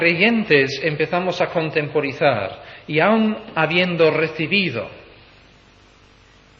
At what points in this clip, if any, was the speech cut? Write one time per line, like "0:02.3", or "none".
0:02.1